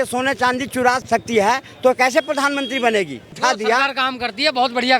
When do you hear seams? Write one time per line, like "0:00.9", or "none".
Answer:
0:01.0
0:03.3